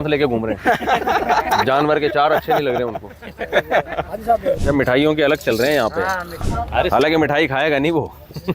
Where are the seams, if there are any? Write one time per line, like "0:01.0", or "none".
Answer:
0:04.6
0:06.4